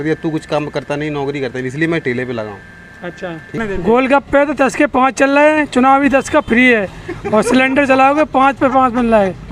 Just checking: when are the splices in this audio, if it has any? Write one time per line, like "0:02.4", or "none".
0:03.6

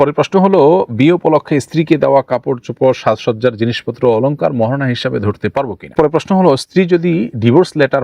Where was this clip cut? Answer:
0:05.9

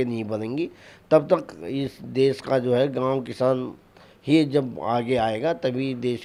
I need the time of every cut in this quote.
none

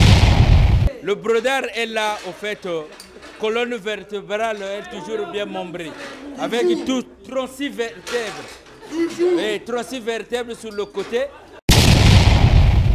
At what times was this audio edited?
0:00.9
0:11.5

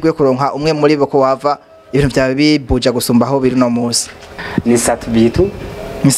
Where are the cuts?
0:04.5

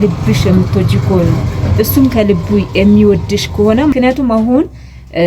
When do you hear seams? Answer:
0:03.9

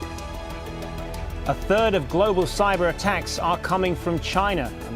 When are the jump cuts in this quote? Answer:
0:01.3

